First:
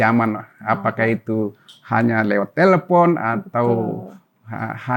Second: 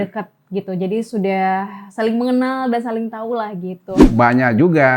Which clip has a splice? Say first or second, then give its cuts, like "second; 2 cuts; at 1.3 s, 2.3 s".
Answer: second; 1 cut; at 4.0 s